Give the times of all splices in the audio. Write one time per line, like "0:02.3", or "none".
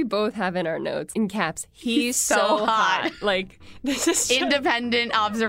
0:01.1